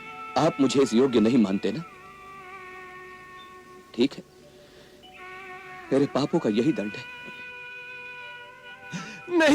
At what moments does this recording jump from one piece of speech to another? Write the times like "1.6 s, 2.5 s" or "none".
none